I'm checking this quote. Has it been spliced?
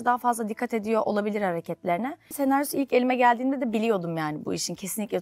yes; 1 cut; at 2.4 s

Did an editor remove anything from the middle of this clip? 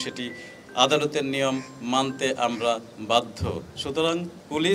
no; 0 cuts

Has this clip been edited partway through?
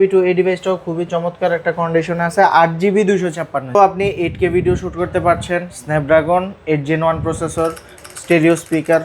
yes; 1 cut; at 3.8 s

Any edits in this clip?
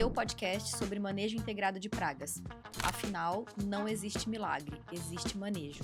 no; 0 cuts

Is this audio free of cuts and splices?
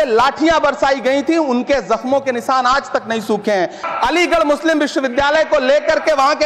no; 1 cut; at 3.8 s

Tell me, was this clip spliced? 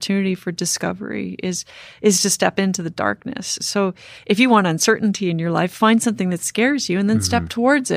no; 0 cuts

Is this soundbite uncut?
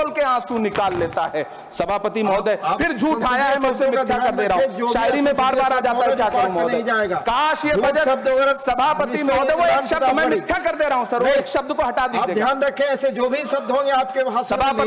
yes; 0 cuts

